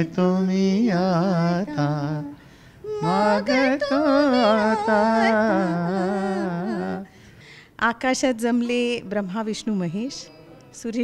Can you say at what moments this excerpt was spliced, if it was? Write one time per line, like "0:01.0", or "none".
0:07.2